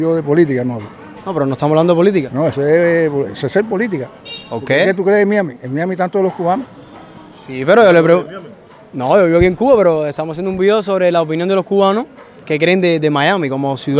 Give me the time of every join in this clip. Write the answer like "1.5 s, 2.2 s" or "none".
none